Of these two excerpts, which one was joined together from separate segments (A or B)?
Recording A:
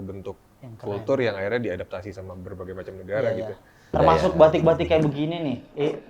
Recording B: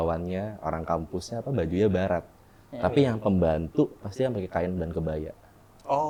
A